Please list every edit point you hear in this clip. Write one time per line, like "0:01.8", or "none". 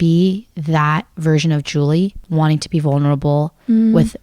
0:02.2